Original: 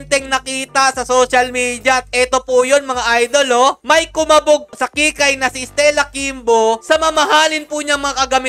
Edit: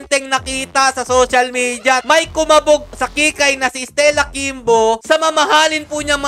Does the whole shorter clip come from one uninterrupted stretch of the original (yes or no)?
no